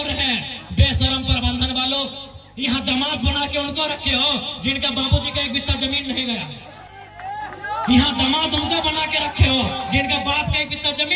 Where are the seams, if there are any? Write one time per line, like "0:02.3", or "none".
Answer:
none